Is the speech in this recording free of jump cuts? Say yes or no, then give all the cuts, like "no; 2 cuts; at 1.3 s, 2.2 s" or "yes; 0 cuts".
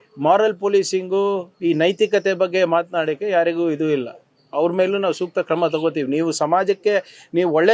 yes; 0 cuts